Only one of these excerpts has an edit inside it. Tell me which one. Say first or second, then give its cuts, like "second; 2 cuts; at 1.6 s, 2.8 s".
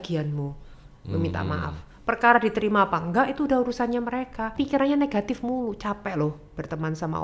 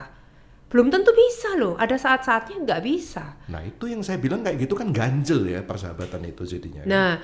first; 1 cut; at 4.5 s